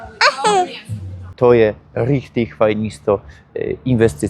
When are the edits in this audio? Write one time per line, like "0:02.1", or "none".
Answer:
0:01.1